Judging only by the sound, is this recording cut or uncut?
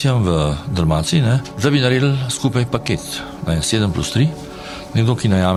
uncut